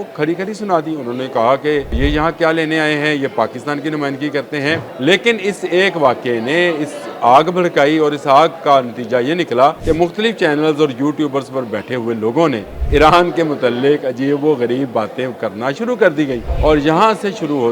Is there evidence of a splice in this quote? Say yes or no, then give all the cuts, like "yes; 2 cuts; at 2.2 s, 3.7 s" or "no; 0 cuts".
yes; 5 cuts; at 2.0 s, 4.9 s, 9.8 s, 12.7 s, 16.5 s